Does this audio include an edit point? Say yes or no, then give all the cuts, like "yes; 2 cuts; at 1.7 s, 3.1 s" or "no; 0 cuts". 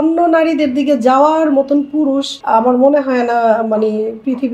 yes; 1 cut; at 2.3 s